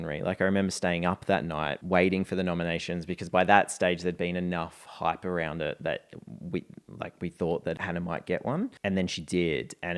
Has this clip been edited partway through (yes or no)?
yes